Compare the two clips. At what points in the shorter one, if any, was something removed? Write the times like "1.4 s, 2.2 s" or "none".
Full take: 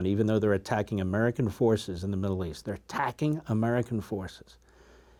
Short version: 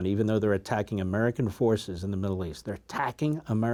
none